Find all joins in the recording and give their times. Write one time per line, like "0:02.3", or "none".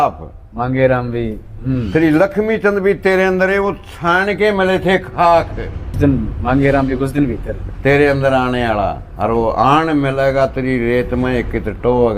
0:06.0